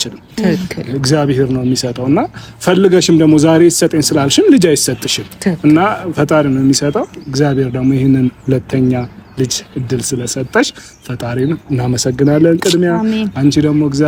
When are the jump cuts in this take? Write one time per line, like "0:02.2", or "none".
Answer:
none

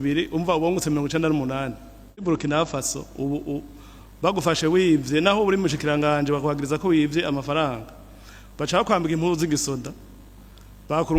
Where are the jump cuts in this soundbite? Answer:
0:02.2

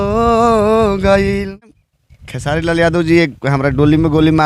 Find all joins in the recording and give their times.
0:01.6

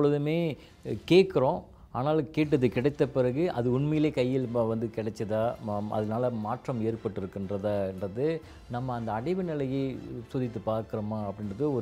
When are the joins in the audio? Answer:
none

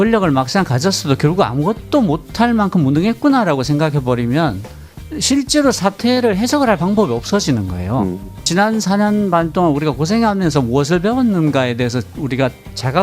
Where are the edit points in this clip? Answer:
0:08.5

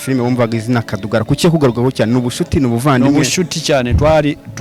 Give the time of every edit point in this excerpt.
none

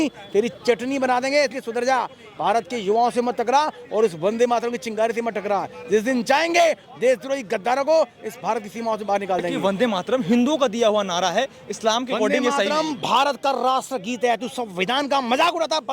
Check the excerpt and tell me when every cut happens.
0:09.5

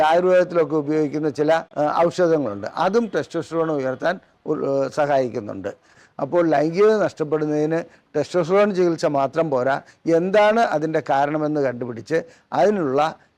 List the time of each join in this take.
0:05.9

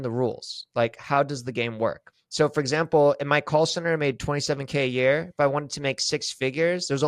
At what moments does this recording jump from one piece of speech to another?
0:02.1

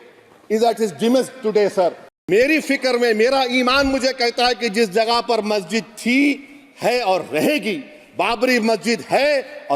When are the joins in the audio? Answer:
0:02.1

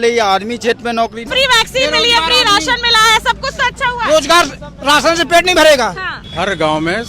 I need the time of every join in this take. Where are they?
0:01.3
0:06.1

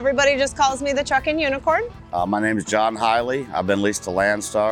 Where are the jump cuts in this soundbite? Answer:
0:02.0

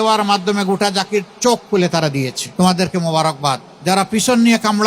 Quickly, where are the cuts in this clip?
0:02.4
0:03.7

